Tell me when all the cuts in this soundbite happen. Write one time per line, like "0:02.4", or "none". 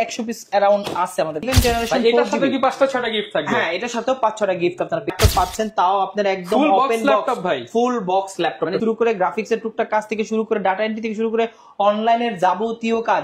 0:01.4
0:05.1
0:08.8